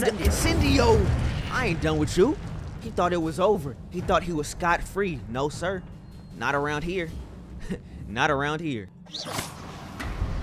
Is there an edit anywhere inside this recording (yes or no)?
no